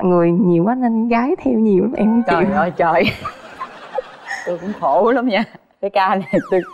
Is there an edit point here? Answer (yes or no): no